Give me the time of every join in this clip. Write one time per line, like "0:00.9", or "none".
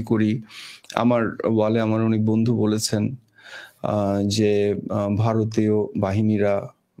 none